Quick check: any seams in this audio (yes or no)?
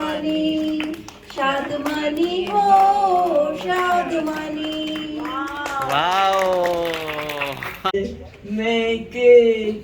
yes